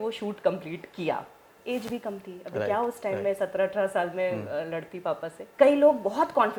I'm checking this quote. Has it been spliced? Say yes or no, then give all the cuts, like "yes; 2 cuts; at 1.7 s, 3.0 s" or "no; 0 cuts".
yes; 2 cuts; at 1.5 s, 5.4 s